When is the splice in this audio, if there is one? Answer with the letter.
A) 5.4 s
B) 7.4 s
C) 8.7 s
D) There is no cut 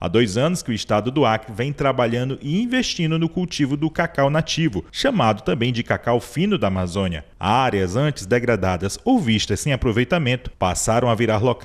D